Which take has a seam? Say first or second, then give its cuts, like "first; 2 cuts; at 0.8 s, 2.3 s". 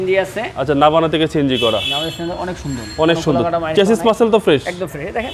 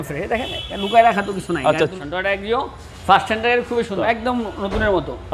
second; 2 cuts; at 2.0 s, 4.0 s